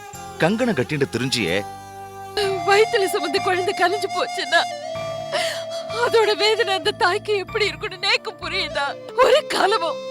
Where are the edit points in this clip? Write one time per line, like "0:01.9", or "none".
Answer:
0:02.3
0:09.0